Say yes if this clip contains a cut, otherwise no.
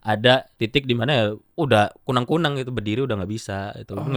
yes